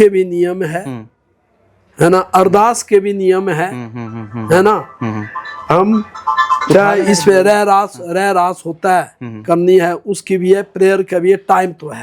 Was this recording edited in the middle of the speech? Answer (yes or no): no